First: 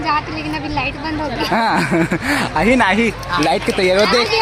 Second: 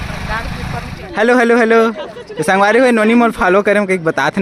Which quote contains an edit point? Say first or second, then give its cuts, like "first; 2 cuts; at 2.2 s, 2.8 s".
second; 1 cut; at 1.0 s